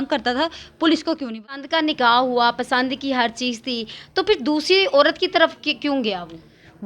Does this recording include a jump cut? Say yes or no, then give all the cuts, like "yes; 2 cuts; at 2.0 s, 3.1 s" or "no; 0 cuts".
yes; 1 cut; at 1.6 s